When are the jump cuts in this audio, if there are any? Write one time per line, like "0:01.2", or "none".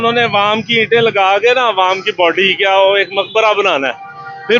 none